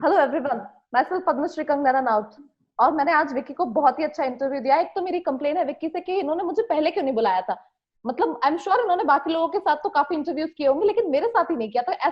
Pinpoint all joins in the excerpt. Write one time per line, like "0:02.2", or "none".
none